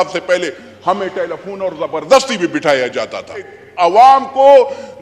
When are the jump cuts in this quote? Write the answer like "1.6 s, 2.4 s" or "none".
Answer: 3.6 s